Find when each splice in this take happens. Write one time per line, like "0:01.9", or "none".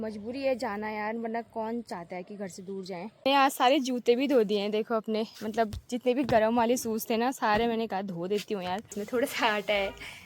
0:03.2
0:09.0

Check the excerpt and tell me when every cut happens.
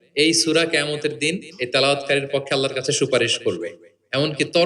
none

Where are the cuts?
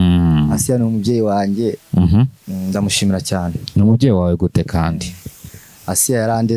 none

